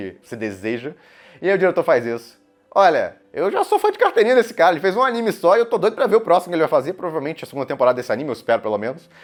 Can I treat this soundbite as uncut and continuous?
yes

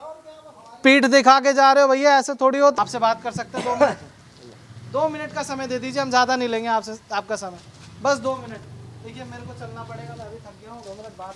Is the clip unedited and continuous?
yes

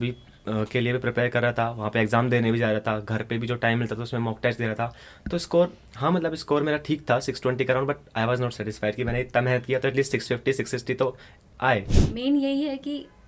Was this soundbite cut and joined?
yes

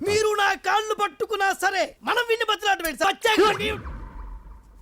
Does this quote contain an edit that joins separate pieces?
yes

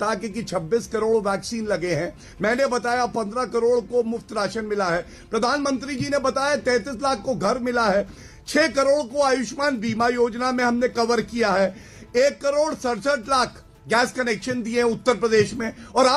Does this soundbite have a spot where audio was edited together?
no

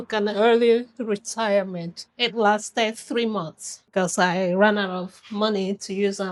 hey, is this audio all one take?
yes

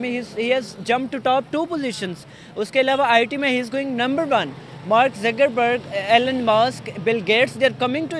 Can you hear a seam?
no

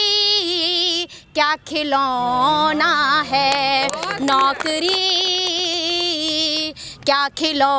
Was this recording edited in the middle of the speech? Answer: no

